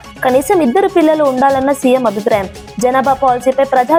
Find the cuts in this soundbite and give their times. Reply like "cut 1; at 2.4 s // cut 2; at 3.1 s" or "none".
none